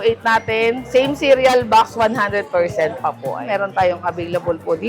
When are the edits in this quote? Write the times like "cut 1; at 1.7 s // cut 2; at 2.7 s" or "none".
cut 1; at 0.8 s // cut 2; at 3.4 s